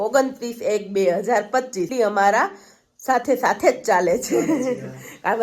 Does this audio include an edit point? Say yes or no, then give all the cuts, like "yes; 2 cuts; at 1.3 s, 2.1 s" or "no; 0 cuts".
yes; 1 cut; at 1.9 s